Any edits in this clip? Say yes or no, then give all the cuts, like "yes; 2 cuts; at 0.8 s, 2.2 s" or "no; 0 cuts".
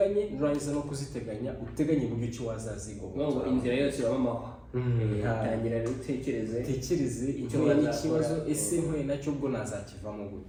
no; 0 cuts